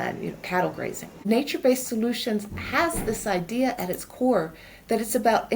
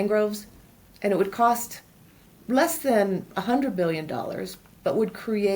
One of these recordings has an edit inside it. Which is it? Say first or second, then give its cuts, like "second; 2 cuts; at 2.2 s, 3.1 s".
first; 1 cut; at 1.2 s